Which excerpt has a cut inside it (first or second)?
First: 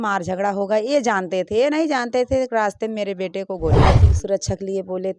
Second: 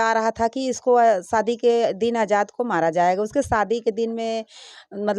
first